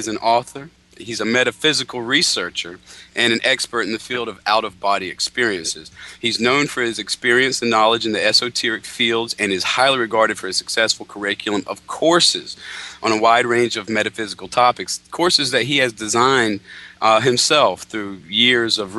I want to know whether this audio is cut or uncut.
uncut